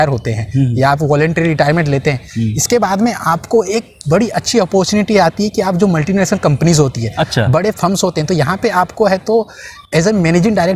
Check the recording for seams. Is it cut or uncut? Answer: uncut